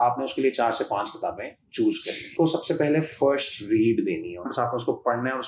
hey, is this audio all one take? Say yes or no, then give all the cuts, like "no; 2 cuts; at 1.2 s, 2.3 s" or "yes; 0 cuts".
no; 2 cuts; at 2.3 s, 4.5 s